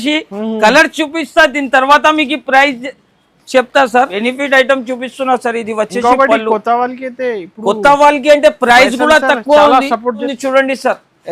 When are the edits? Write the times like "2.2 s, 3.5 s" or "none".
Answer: 4.1 s, 10.3 s